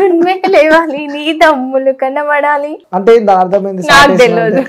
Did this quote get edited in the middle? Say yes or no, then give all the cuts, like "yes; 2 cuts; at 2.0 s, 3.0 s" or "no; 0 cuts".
yes; 1 cut; at 2.8 s